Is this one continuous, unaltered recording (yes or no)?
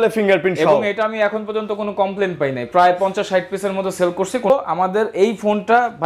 no